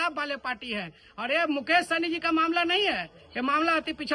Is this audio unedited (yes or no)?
yes